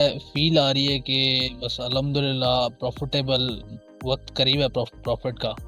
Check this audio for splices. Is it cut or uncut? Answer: uncut